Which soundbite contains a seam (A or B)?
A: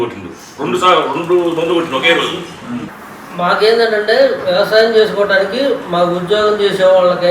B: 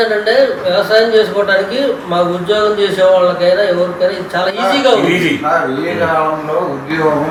A